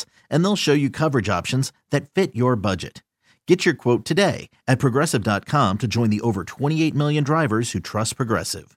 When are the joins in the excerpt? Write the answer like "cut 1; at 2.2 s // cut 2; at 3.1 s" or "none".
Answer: none